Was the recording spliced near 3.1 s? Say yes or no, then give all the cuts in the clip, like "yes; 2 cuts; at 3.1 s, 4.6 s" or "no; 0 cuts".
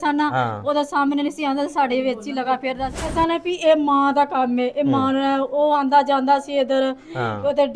yes; 1 cut; at 3.1 s